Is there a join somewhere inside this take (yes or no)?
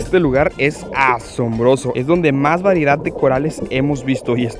no